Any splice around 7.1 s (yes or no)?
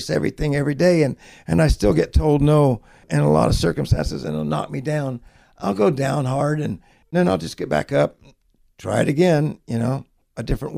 yes